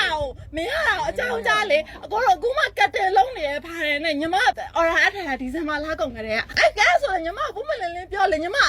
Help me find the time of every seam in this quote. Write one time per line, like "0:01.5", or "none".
0:04.6
0:06.5